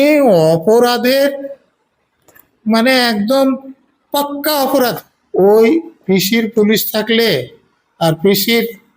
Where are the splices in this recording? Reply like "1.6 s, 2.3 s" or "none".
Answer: 4.9 s

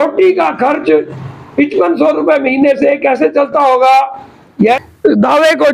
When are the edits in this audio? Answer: 4.8 s

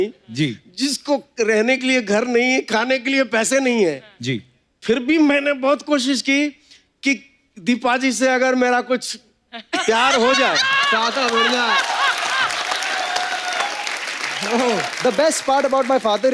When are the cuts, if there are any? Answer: 14.9 s

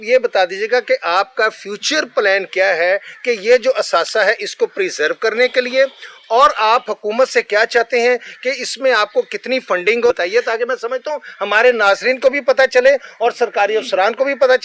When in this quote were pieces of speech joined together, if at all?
10.1 s

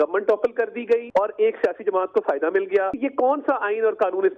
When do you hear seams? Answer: 1.1 s, 2.9 s

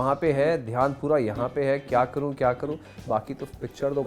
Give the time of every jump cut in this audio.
2.9 s

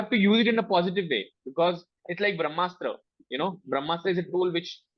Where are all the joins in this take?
none

